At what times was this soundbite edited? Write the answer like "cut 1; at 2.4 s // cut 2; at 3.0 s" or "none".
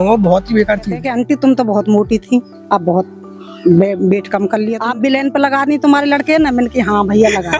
cut 1; at 1.0 s // cut 2; at 4.8 s